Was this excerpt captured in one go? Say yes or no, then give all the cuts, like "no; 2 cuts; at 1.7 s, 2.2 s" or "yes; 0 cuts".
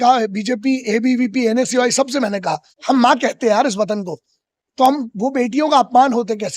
no; 1 cut; at 2.7 s